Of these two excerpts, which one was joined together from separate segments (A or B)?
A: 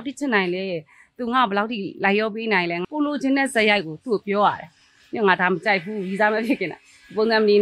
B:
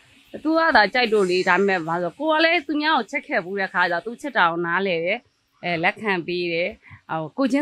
A